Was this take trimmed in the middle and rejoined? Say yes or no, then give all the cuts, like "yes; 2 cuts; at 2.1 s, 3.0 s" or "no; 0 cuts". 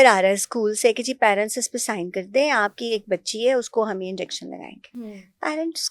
no; 0 cuts